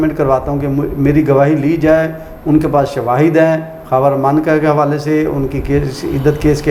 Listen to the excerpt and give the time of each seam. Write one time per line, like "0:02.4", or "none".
none